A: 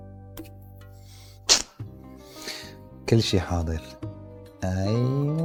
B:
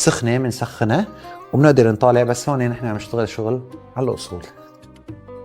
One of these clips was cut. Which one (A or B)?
B